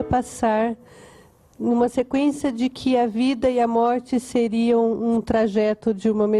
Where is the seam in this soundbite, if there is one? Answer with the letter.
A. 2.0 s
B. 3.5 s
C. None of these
C